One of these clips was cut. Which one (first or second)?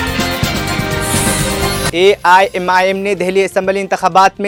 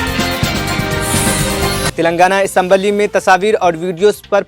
second